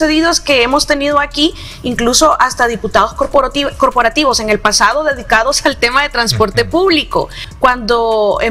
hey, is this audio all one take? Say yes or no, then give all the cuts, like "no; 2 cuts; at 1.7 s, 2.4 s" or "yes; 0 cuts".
no; 1 cut; at 7.4 s